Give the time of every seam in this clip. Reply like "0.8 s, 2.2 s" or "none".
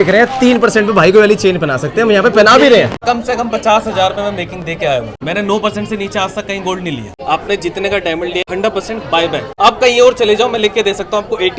3.0 s, 5.1 s, 7.1 s, 8.4 s, 9.5 s